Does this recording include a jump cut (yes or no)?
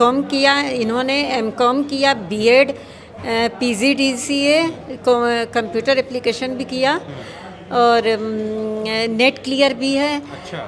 no